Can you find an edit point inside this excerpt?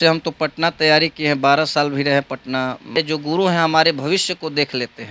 yes; 1 cut; at 3.0 s

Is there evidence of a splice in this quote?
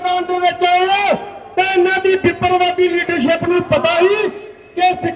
no; 0 cuts

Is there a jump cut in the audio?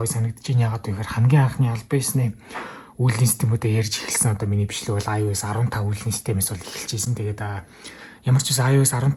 no; 0 cuts

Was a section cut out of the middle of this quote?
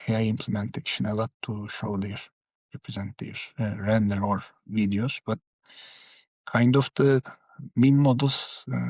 no; 0 cuts

